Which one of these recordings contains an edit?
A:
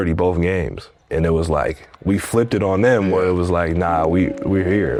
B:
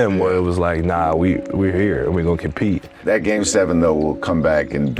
B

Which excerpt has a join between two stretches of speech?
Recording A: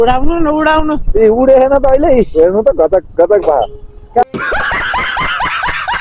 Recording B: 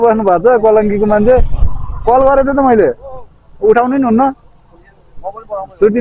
A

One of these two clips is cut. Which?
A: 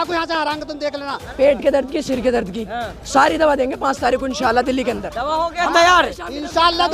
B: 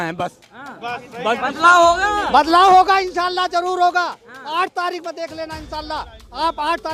A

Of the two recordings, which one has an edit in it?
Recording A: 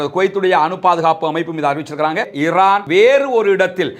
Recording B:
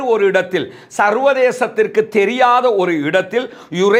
A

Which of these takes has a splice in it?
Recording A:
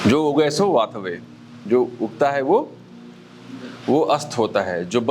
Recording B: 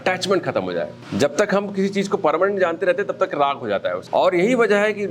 B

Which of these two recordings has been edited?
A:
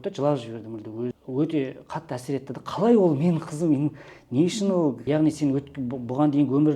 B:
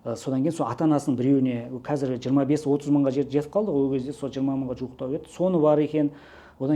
A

